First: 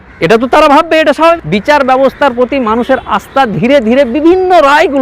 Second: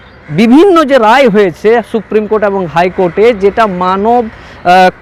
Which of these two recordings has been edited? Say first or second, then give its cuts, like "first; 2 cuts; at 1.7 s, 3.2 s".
first; 1 cut; at 1.4 s